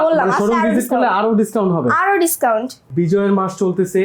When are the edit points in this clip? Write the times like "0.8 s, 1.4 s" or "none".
2.8 s